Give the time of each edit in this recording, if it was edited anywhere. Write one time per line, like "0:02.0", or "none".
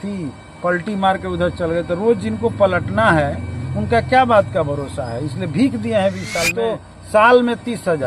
0:06.4